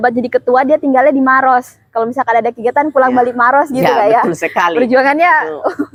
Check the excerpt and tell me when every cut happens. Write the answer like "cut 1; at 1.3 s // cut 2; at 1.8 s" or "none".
none